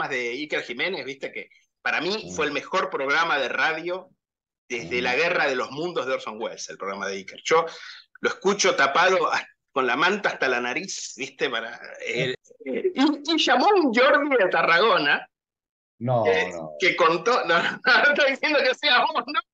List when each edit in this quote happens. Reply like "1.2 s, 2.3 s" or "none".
12.4 s